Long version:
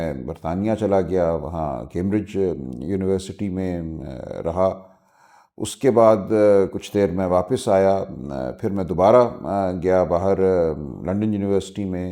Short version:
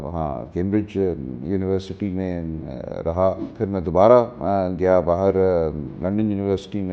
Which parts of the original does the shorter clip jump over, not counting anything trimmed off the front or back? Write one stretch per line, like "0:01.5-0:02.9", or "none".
0:04.9-0:08.5